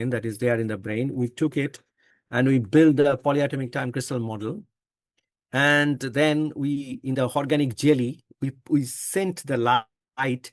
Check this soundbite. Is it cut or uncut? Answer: uncut